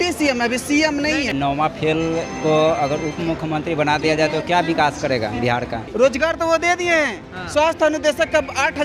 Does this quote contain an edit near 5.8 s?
yes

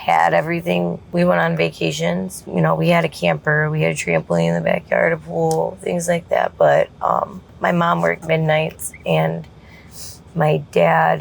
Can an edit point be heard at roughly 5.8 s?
no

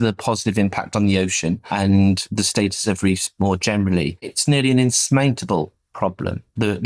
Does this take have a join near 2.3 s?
yes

